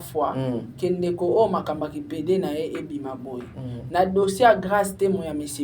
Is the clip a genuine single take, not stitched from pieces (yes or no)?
yes